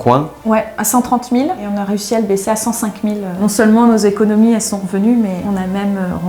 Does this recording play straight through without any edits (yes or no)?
no